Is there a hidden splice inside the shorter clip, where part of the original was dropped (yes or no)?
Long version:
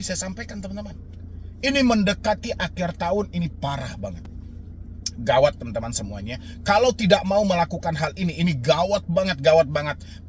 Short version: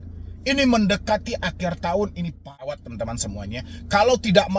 yes